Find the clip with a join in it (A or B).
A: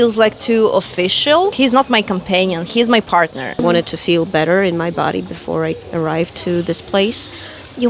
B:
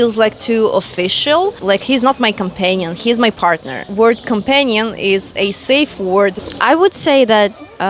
A